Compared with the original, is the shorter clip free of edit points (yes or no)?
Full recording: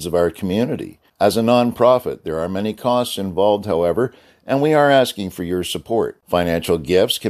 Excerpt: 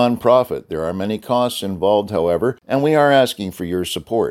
no